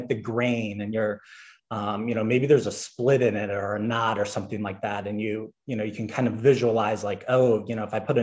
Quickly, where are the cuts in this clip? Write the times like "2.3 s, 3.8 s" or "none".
none